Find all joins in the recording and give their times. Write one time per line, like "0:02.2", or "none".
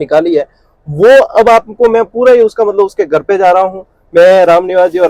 none